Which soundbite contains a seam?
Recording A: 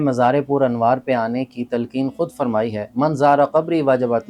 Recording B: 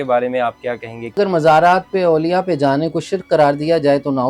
B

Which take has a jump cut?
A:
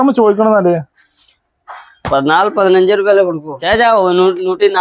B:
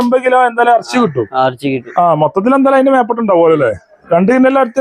A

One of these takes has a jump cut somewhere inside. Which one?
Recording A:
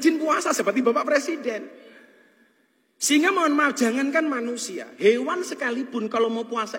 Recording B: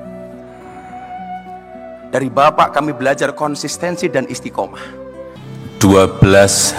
B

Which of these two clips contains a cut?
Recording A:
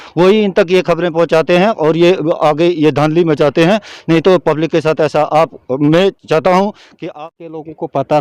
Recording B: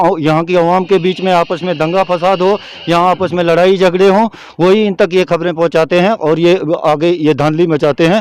A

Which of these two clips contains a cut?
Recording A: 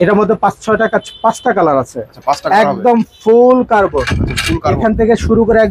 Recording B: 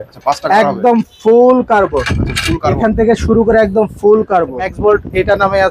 B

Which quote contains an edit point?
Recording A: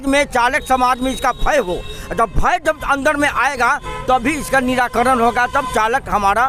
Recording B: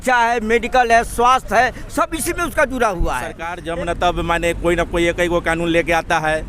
B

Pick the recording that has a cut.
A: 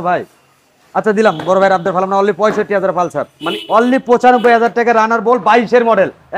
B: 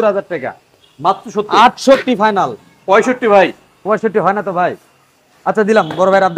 A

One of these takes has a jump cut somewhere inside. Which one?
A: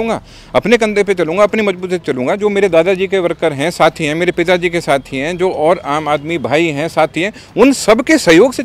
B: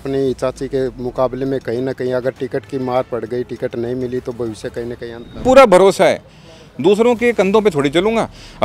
B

